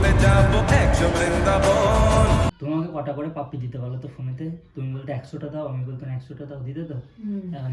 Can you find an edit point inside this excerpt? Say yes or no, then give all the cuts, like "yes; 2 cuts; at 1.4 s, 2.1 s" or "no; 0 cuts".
yes; 1 cut; at 2.5 s